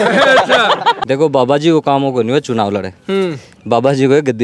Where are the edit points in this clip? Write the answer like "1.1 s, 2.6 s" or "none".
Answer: 1.0 s